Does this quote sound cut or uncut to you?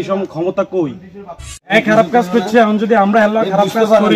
cut